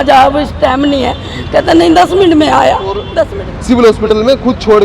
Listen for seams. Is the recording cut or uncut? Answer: cut